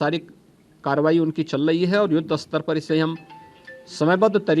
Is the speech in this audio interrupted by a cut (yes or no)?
no